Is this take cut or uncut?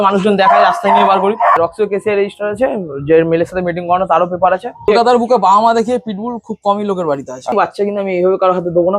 cut